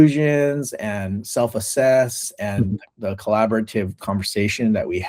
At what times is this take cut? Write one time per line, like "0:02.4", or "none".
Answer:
0:02.9